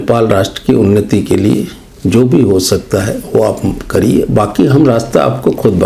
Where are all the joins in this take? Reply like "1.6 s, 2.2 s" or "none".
none